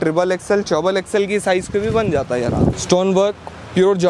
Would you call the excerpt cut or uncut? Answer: cut